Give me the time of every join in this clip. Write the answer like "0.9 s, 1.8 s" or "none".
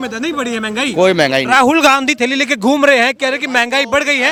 none